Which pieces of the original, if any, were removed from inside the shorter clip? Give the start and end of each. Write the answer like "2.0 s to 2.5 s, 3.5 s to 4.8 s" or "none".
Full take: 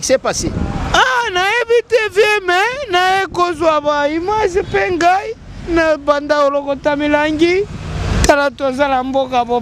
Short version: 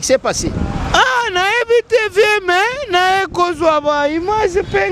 none